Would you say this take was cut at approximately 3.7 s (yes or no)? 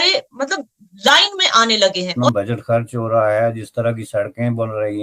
no